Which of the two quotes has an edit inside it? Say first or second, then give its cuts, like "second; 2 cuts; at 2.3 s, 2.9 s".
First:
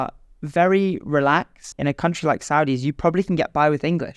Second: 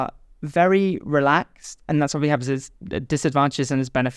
first; 1 cut; at 1.7 s